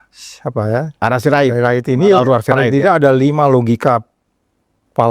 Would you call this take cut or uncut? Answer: uncut